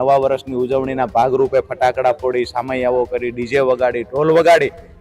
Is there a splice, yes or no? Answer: no